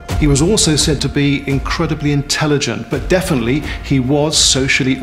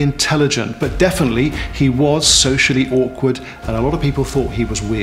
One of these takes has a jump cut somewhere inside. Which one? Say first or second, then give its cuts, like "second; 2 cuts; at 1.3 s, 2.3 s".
first; 1 cut; at 1.0 s